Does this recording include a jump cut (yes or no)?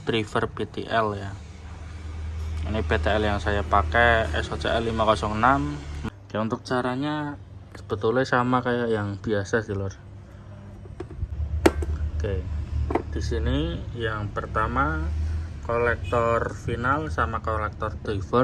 yes